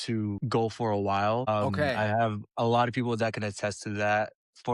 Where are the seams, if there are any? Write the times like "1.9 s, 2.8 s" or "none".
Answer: none